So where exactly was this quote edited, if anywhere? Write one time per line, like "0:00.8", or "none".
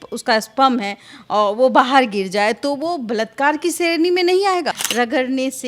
0:04.7